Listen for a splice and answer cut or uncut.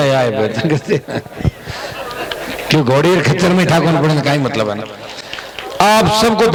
uncut